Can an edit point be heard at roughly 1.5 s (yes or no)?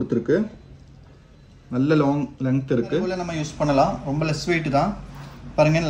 no